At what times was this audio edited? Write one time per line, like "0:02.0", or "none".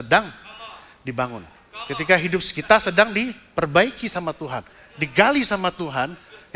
none